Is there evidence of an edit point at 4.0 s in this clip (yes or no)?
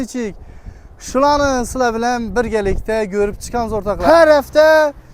yes